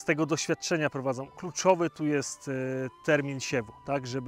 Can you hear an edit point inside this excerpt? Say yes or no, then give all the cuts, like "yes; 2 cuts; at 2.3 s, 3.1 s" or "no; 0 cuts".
no; 0 cuts